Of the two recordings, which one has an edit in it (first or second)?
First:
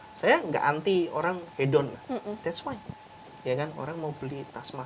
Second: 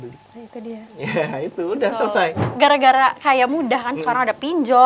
second